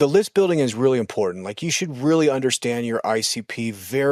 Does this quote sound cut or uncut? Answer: uncut